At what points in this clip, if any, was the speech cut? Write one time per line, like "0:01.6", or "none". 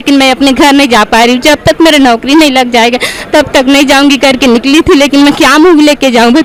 none